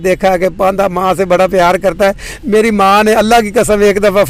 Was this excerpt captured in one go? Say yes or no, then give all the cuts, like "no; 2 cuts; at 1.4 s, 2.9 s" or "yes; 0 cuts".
yes; 0 cuts